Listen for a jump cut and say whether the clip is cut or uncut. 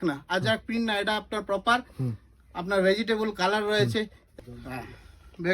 cut